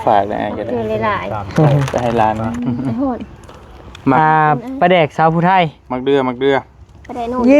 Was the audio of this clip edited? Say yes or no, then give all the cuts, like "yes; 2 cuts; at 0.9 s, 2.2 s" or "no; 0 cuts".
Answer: yes; 1 cut; at 2.5 s